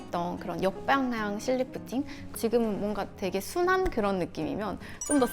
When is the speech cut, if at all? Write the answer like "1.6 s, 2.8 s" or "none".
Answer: 2.3 s